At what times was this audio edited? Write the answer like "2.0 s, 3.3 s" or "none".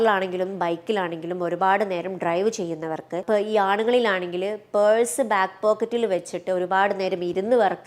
3.2 s